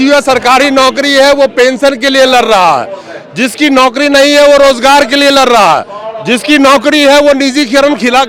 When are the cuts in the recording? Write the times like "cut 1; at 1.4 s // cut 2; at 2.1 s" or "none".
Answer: none